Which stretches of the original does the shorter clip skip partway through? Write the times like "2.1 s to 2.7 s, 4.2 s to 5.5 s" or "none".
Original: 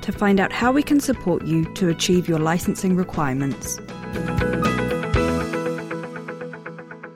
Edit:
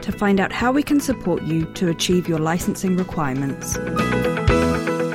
3.7 s to 4.4 s